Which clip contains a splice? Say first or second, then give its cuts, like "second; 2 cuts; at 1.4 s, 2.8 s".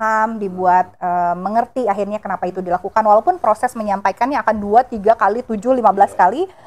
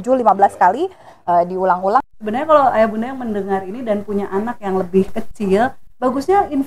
second; 1 cut; at 2.0 s